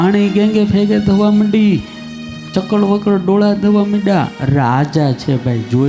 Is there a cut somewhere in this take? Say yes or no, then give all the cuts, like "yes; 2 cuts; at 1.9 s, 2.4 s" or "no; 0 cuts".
no; 0 cuts